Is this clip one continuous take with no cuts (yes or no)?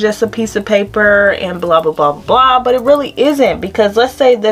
yes